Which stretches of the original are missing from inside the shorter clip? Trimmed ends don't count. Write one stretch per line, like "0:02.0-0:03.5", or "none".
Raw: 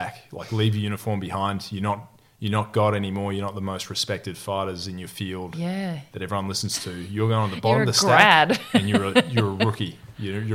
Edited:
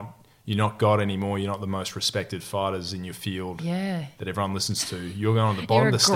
none